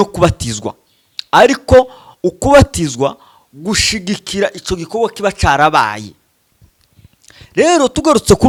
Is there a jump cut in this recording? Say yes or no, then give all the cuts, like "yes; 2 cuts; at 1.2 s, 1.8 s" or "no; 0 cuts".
no; 0 cuts